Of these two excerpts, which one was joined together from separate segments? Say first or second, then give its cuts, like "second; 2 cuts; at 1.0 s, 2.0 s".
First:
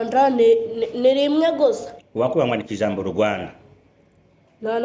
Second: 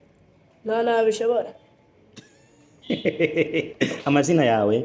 first; 1 cut; at 1.9 s